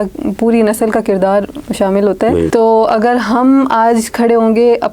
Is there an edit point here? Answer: yes; 1 cut; at 2.5 s

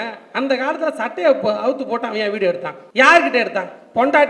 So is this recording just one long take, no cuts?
no; 1 cut; at 2.8 s

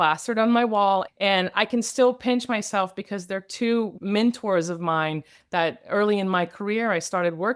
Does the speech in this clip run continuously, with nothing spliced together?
no; 1 cut; at 1.1 s

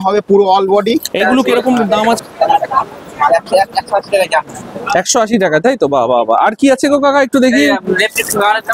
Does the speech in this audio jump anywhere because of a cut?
yes; 1 cut; at 2.2 s

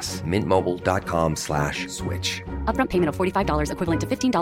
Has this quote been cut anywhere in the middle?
no; 0 cuts

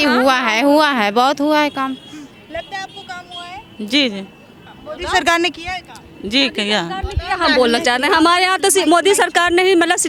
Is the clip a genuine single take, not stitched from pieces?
yes; 0 cuts

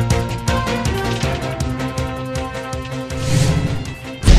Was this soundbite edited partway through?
yes; 1 cut; at 3.3 s

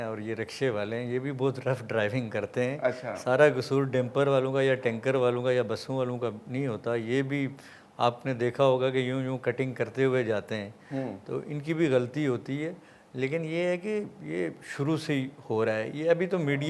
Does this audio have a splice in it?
no; 0 cuts

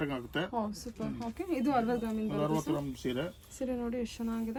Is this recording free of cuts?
yes; 0 cuts

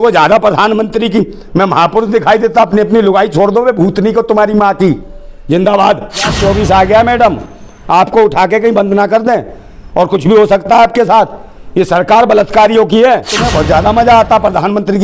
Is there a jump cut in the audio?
yes; 2 cuts; at 6.4 s, 13.4 s

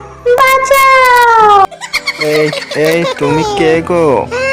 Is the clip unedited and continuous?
no; 1 cut; at 1.7 s

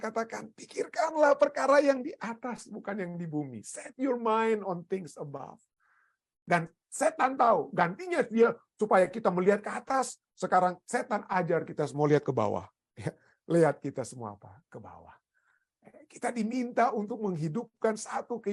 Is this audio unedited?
yes; 0 cuts

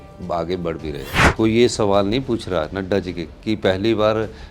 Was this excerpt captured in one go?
no; 1 cut; at 1.2 s

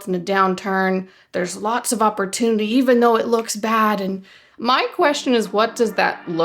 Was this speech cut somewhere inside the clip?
yes; 1 cut; at 4.4 s

